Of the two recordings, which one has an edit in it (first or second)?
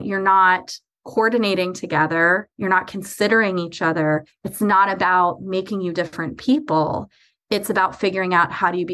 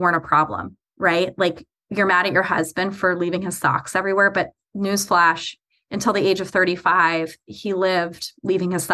first